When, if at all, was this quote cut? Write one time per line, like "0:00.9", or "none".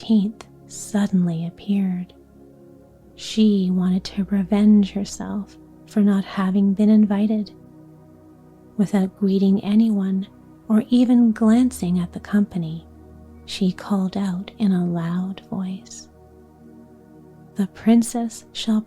none